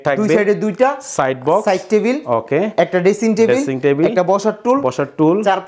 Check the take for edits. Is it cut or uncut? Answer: uncut